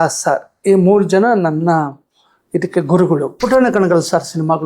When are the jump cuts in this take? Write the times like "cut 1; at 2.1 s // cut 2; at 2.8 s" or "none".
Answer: cut 1; at 3.3 s